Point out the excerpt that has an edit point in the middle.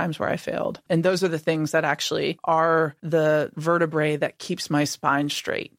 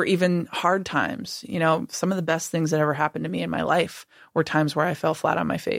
first; 3 cuts; at 0.8 s, 2.4 s, 3.0 s

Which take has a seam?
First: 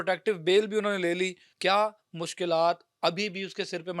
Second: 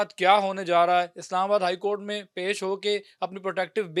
first; 1 cut; at 1.5 s

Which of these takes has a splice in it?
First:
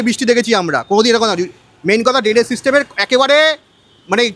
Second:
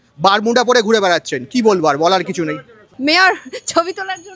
second; 1 cut; at 2.8 s

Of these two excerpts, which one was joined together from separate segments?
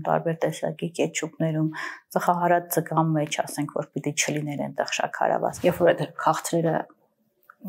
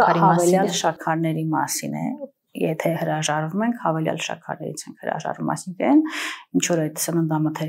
first; 1 cut; at 5.6 s

